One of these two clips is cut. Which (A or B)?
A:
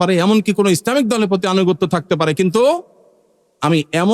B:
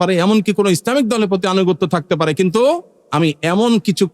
B